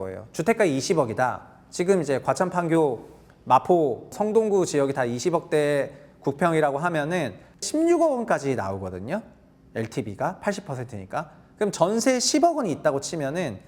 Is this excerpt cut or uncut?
cut